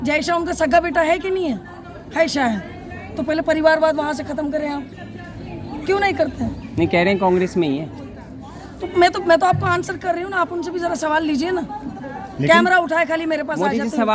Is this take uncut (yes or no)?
yes